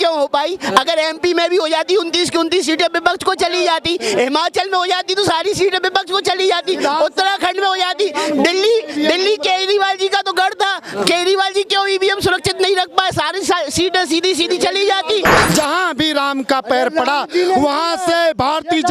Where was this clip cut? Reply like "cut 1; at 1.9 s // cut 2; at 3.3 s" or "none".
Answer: cut 1; at 15.4 s